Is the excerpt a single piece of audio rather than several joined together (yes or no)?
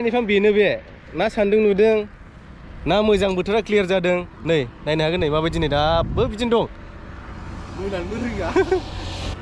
yes